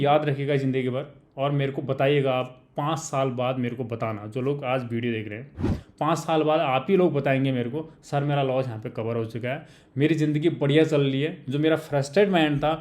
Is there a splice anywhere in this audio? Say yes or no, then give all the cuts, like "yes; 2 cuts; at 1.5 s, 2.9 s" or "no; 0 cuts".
no; 0 cuts